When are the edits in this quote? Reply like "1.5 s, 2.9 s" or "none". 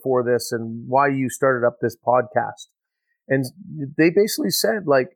none